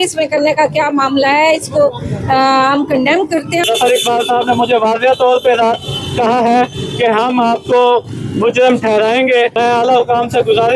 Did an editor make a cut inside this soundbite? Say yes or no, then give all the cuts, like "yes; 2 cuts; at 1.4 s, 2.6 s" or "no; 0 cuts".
yes; 2 cuts; at 3.6 s, 9.5 s